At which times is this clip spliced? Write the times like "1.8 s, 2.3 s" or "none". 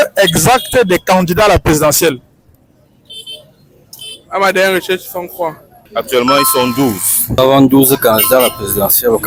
none